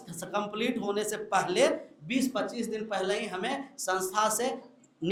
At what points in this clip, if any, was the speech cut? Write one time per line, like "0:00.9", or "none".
none